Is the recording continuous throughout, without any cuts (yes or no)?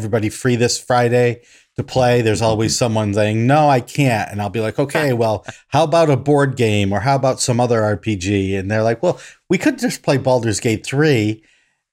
yes